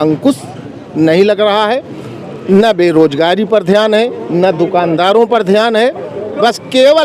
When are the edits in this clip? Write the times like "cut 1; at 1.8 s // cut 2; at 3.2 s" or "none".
none